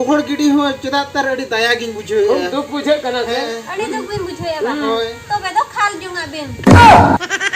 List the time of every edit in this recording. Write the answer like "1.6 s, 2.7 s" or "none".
6.5 s